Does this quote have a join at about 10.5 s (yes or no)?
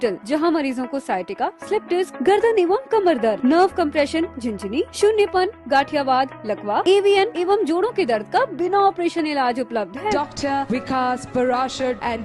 no